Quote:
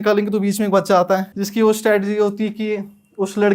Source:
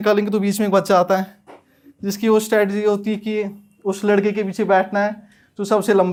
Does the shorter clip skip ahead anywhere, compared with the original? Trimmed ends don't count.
yes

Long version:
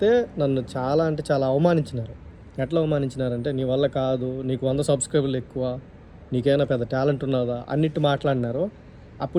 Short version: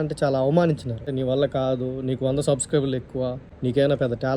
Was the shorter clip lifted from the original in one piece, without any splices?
no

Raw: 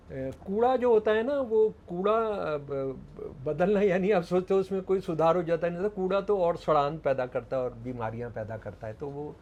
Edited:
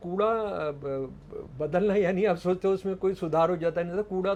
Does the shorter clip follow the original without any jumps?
yes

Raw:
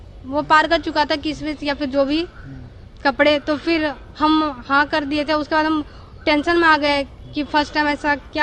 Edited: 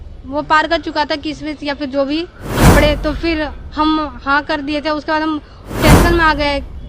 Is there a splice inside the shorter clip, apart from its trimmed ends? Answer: yes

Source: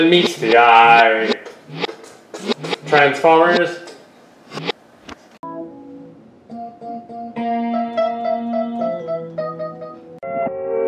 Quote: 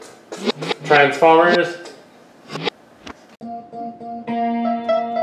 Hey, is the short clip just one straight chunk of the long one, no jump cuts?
no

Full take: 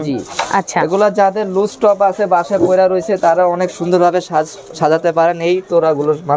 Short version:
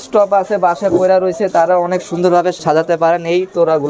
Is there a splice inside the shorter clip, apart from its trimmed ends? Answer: yes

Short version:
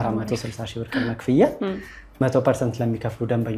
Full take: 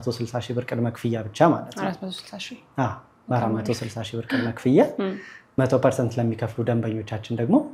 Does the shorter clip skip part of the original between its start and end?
no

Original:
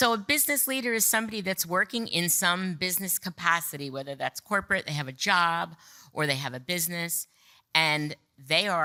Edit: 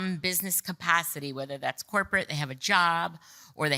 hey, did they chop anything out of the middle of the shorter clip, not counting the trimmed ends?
no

